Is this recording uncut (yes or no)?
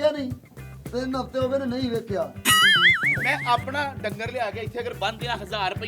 no